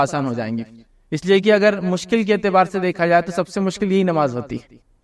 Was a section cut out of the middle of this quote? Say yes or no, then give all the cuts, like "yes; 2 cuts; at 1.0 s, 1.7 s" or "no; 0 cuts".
no; 0 cuts